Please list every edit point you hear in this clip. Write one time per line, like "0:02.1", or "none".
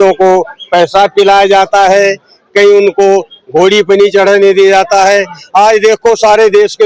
none